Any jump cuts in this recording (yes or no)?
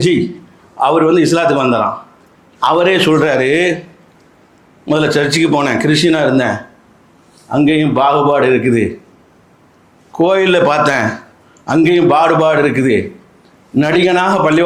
no